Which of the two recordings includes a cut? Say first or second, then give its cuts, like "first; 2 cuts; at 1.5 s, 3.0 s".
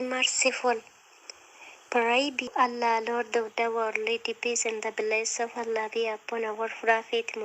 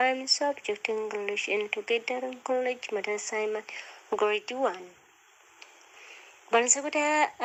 first; 1 cut; at 2.5 s